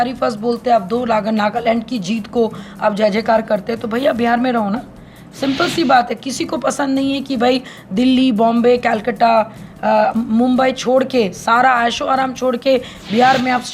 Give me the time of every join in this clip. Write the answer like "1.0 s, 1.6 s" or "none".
none